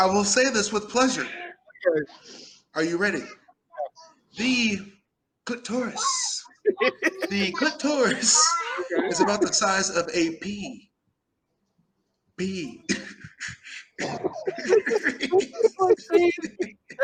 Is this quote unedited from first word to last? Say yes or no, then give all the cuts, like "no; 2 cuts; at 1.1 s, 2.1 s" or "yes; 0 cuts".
yes; 0 cuts